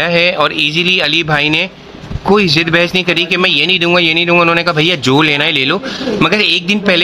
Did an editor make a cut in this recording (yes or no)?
no